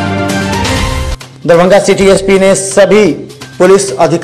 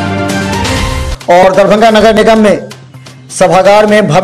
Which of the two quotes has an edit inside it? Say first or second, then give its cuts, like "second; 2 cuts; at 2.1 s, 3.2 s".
second; 1 cut; at 1.1 s